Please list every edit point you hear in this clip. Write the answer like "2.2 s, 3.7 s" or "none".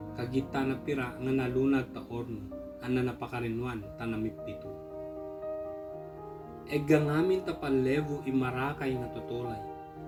none

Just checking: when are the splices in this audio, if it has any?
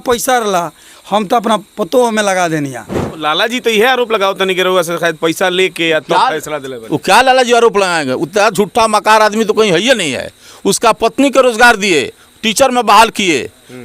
3.2 s

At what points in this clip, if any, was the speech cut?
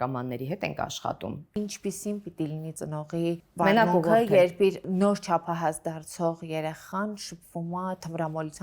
1.6 s, 3.1 s, 4.8 s

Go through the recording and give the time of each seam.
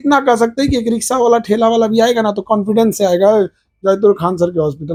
none

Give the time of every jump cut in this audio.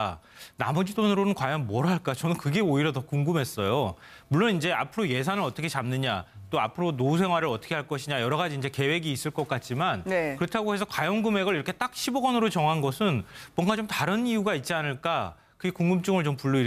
none

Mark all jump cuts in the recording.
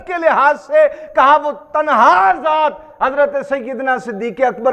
none

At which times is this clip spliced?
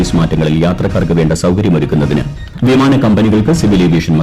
2.4 s

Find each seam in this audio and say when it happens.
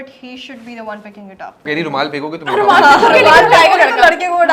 1.6 s

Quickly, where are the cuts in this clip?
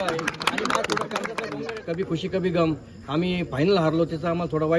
1.6 s

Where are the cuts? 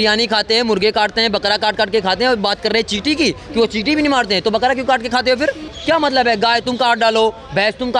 none

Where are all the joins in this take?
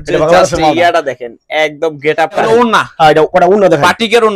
2.4 s

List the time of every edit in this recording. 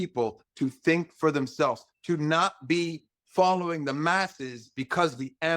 1.9 s

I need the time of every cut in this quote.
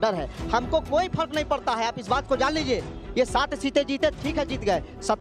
none

